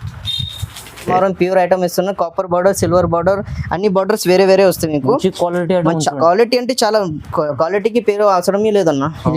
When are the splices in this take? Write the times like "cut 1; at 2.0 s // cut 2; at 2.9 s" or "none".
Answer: cut 1; at 1.1 s